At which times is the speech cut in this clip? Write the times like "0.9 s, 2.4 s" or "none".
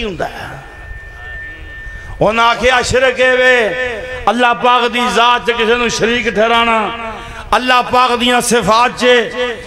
none